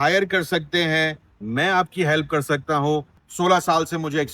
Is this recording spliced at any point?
yes; 1 cut; at 3.2 s

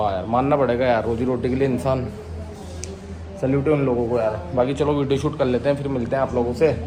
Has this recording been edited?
no; 0 cuts

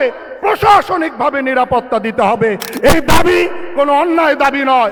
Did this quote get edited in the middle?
no; 0 cuts

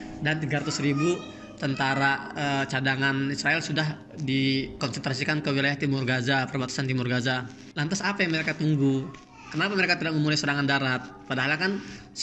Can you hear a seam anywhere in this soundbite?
no; 0 cuts

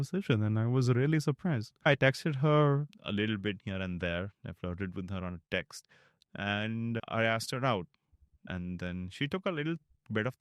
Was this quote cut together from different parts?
yes; 2 cuts; at 1.9 s, 2.9 s

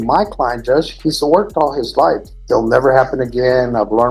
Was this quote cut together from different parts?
yes; 1 cut; at 2.3 s

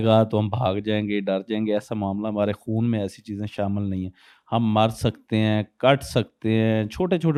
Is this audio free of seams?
yes; 0 cuts

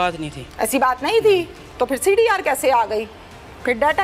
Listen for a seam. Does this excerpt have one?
no; 0 cuts

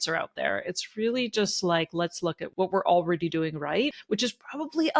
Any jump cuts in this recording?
yes; 2 cuts; at 2.4 s, 4.0 s

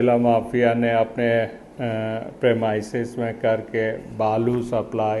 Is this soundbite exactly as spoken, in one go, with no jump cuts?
yes; 0 cuts

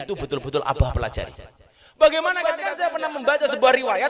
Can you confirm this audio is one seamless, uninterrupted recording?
no; 1 cut; at 2.5 s

